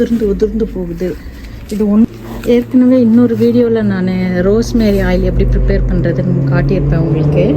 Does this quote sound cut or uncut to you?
cut